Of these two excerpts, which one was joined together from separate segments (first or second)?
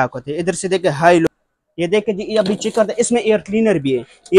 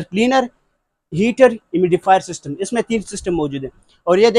first